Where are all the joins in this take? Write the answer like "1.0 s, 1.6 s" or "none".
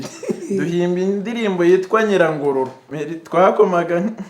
2.8 s